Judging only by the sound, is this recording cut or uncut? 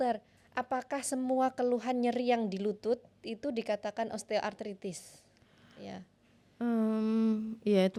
uncut